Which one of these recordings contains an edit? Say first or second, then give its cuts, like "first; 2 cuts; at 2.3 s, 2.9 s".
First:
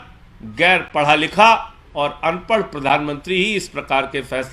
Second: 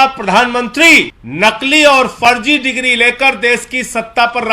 second; 1 cut; at 1.2 s